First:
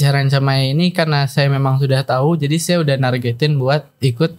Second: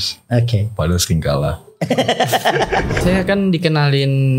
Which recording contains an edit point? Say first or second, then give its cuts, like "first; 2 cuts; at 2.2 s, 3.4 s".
second; 1 cut; at 2.9 s